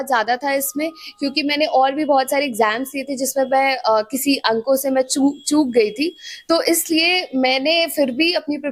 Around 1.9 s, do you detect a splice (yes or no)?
no